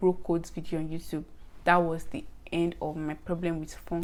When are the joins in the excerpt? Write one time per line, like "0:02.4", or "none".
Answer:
none